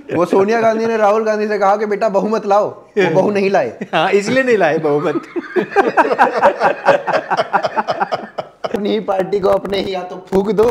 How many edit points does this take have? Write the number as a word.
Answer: one